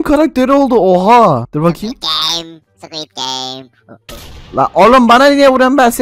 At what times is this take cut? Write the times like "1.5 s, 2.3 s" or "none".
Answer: none